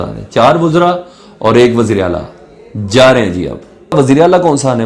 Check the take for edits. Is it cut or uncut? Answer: cut